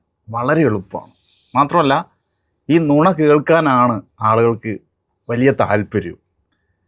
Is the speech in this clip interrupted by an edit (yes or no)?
no